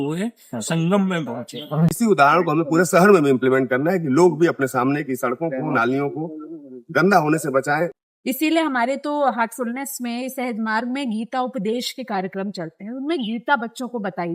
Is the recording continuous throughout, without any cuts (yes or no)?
no